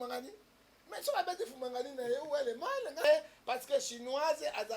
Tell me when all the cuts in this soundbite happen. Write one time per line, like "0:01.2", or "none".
0:03.0